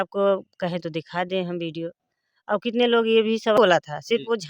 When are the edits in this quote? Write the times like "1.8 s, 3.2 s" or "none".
3.6 s